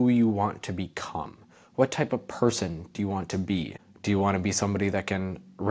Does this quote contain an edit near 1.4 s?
no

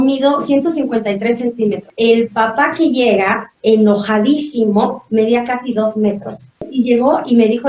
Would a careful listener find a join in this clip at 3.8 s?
no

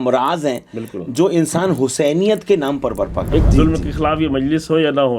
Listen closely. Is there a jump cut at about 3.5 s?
yes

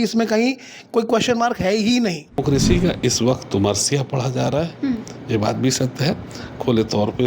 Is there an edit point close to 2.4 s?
yes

